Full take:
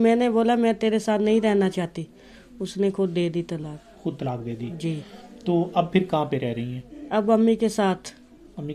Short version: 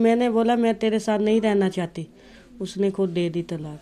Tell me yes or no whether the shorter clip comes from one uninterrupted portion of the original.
yes